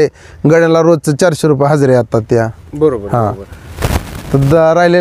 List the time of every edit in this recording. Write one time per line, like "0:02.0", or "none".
0:03.7